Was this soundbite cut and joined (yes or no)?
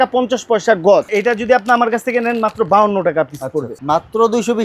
yes